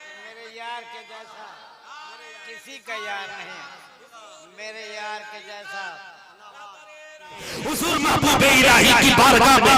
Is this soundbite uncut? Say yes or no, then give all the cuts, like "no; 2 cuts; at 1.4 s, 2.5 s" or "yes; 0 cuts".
no; 1 cut; at 7.7 s